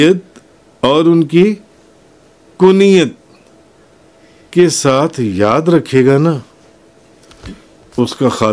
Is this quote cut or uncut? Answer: uncut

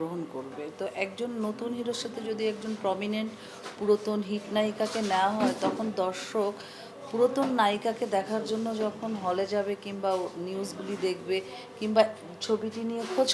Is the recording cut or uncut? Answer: uncut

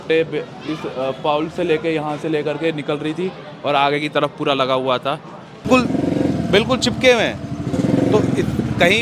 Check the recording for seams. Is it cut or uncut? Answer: cut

